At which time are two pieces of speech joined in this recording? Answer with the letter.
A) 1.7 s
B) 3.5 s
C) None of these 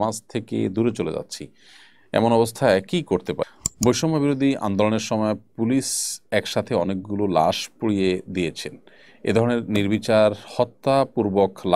B